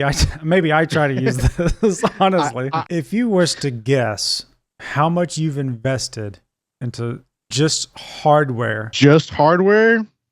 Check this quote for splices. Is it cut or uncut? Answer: cut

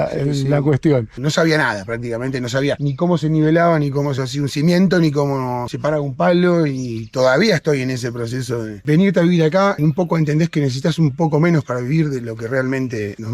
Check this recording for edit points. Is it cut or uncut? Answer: cut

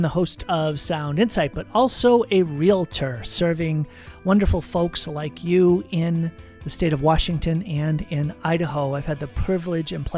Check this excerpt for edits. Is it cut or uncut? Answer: uncut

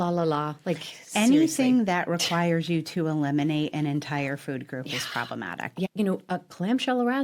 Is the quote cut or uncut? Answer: cut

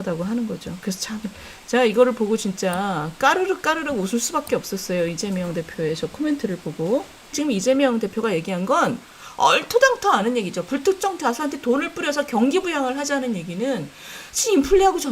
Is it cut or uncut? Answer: cut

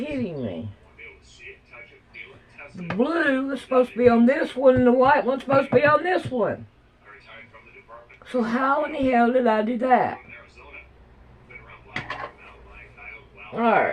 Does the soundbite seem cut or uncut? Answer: uncut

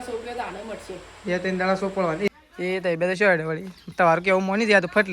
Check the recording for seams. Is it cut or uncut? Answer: cut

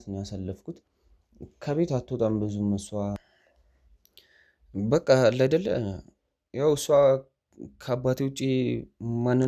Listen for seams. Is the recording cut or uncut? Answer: cut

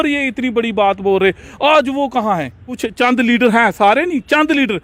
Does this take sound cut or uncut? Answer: cut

